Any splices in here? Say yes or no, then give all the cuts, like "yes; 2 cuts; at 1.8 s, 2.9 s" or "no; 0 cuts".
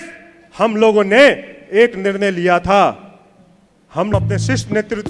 yes; 1 cut; at 4.1 s